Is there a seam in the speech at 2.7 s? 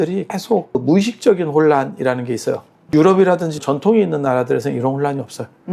yes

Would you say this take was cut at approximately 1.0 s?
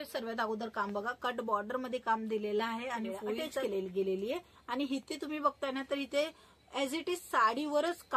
no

